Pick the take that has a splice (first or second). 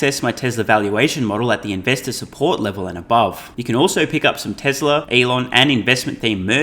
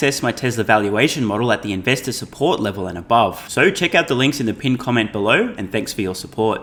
first